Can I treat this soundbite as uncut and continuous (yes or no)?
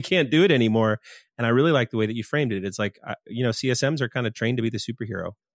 yes